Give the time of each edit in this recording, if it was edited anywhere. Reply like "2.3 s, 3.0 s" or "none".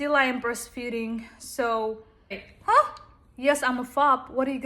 2.5 s